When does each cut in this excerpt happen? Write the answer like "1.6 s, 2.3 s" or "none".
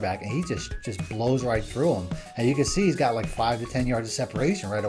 none